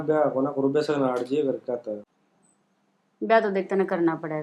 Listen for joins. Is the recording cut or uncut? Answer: cut